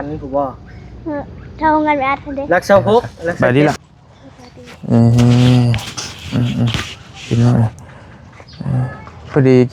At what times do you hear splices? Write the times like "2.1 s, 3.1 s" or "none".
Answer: 3.4 s